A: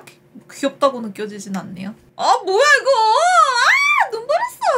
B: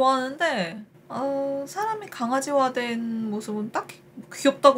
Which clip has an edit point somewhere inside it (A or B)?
A